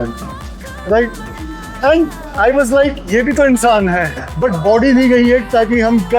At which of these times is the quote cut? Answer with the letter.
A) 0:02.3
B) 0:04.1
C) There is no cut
B